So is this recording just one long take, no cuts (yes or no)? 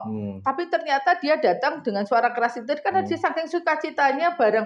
yes